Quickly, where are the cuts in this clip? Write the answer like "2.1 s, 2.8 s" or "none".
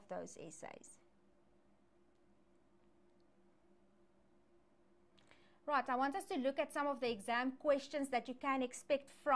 none

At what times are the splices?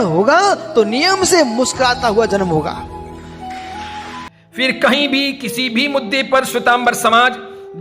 4.1 s

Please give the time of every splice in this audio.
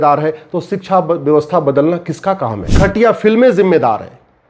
2.6 s

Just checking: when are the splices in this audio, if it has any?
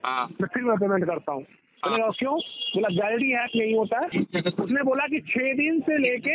4.1 s

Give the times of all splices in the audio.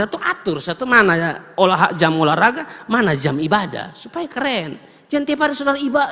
none

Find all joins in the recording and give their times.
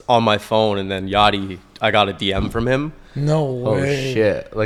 none

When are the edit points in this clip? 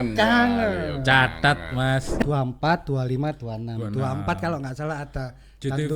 2.2 s

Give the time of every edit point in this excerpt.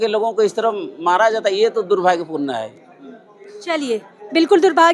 none

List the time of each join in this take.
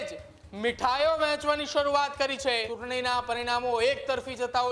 2.7 s

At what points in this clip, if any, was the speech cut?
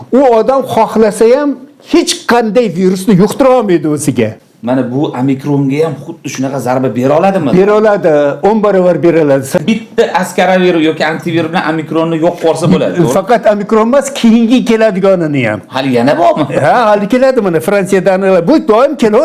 4.4 s, 9.6 s

